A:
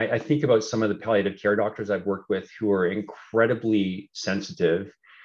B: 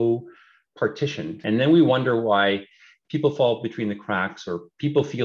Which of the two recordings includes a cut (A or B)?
B